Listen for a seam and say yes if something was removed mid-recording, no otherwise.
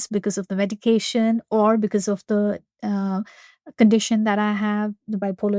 no